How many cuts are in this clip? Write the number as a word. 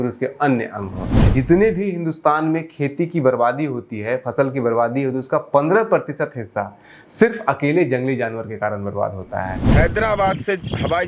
two